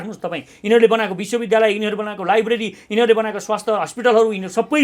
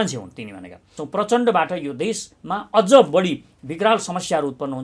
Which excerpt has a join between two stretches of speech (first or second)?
second